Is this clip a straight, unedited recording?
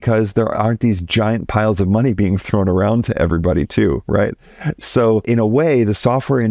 no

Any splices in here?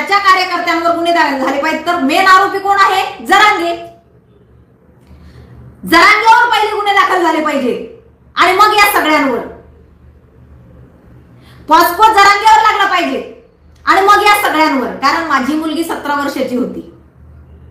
no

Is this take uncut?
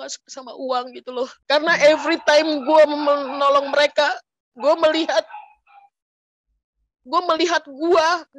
no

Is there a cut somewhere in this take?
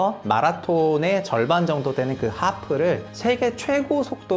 yes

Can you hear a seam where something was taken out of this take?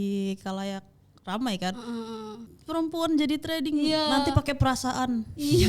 yes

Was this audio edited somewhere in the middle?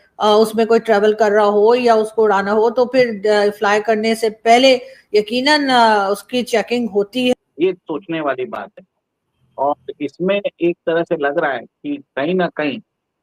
yes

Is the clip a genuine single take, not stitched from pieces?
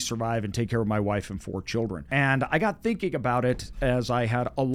no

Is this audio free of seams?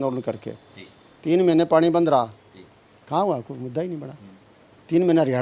yes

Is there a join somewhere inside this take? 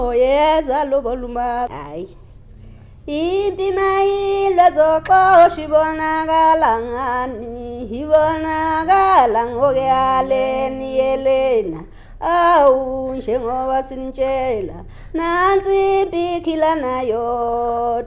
yes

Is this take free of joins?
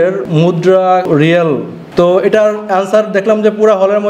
no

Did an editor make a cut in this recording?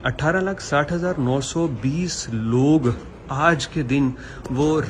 no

